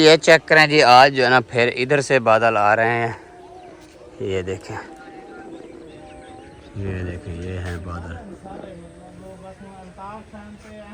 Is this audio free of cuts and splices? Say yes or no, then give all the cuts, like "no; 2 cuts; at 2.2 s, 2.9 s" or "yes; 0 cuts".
yes; 0 cuts